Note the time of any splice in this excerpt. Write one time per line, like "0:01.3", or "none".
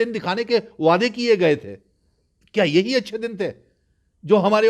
none